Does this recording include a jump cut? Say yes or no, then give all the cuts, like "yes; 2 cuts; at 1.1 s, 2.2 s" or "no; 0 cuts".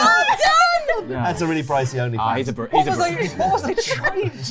yes; 1 cut; at 1.0 s